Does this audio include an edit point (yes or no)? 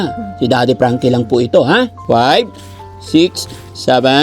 yes